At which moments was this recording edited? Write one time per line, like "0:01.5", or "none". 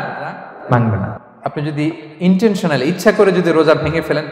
0:01.1